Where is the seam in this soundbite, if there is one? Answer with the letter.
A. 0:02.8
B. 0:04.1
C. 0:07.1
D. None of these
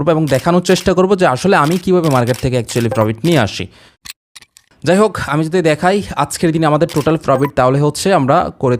B